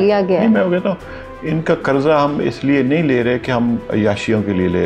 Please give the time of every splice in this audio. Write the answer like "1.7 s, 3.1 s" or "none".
none